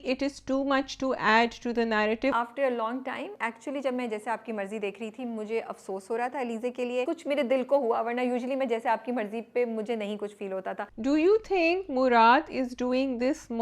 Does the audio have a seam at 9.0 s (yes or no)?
no